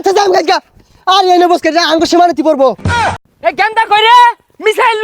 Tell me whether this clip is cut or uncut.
cut